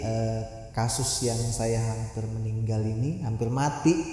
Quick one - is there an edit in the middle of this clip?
no; 0 cuts

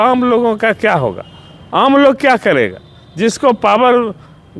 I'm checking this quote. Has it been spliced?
no; 0 cuts

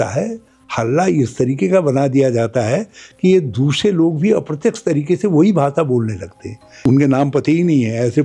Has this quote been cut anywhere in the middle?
yes; 1 cut; at 6.7 s

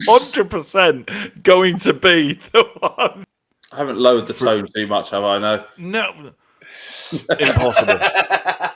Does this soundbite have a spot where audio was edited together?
yes; 1 cut; at 3.2 s

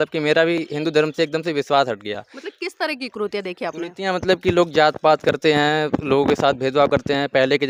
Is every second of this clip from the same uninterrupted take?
yes; 0 cuts

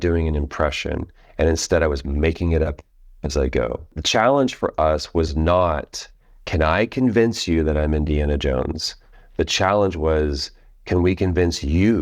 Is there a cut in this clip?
yes; 1 cut; at 4.0 s

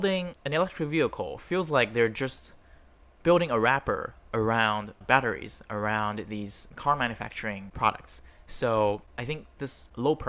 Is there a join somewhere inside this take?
no; 0 cuts

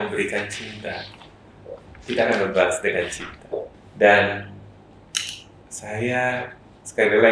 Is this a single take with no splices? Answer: no; 1 cut; at 3.8 s

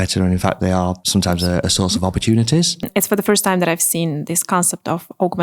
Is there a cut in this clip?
yes; 2 cuts; at 1.4 s, 2.8 s

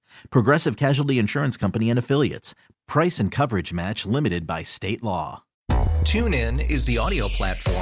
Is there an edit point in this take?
yes; 1 cut; at 5.5 s

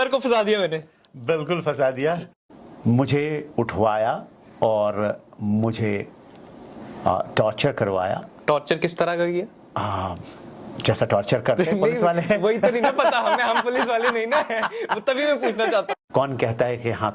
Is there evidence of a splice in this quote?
yes; 2 cuts; at 2.3 s, 15.9 s

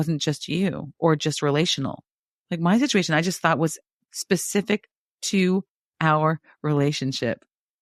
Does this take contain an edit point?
no; 0 cuts

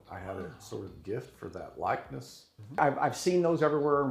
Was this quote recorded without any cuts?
no; 1 cut; at 2.8 s

